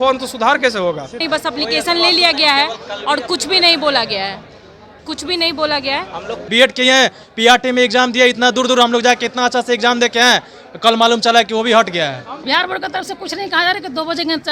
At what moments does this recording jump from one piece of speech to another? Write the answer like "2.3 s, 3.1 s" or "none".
1.2 s, 6.5 s, 12.4 s